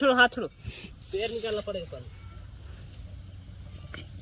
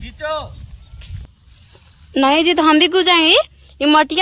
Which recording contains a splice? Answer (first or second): second